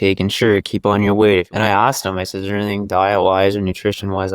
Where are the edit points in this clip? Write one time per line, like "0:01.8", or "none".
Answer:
0:01.5